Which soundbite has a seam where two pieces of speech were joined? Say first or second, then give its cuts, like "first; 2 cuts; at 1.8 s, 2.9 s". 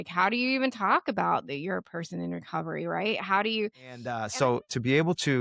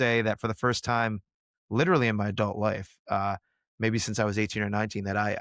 first; 1 cut; at 4.2 s